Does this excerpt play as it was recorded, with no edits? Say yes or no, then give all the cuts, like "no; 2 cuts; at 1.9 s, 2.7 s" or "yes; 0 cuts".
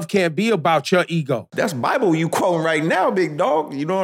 no; 1 cut; at 1.5 s